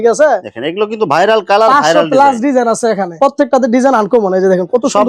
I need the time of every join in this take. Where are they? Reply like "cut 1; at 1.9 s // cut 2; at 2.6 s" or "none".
cut 1; at 3.1 s